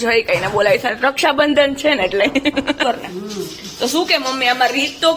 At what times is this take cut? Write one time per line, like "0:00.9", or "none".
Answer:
0:02.8